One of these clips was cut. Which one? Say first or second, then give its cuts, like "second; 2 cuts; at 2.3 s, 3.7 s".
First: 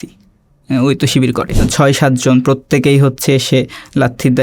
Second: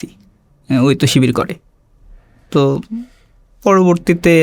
first; 1 cut; at 1.7 s